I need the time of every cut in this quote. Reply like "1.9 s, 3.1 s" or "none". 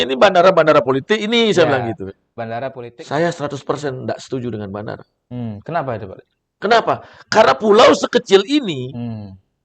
2.7 s

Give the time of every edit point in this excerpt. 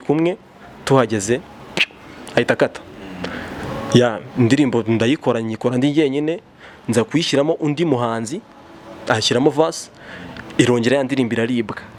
none

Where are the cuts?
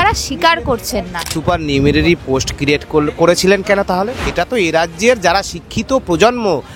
1.3 s, 4.3 s

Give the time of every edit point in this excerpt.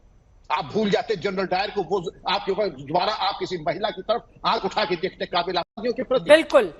5.8 s

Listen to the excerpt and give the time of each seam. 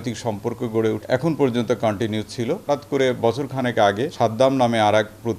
1.0 s, 2.6 s, 4.1 s

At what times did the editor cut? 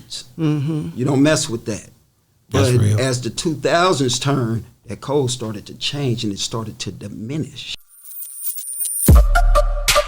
7.8 s

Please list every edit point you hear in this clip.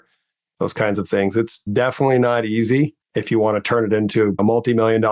1.6 s, 3.1 s, 4.3 s

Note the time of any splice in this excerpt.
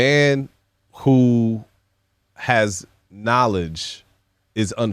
none

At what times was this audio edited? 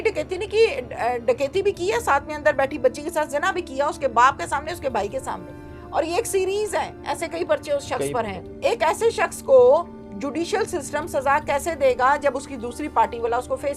8.4 s

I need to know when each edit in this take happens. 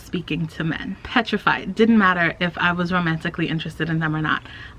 1.0 s

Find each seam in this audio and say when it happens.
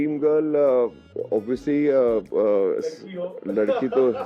1.1 s

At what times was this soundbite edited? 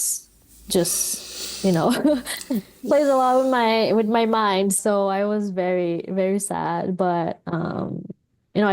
2.7 s, 4.8 s

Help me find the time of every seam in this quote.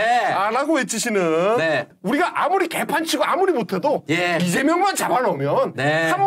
1.9 s

